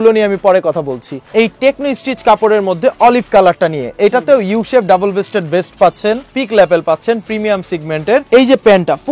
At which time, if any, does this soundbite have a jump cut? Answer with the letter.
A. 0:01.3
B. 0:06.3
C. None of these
A